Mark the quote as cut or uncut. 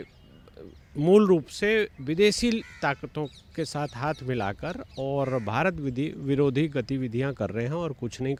uncut